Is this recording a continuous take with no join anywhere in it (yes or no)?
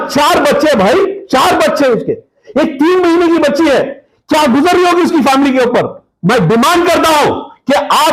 no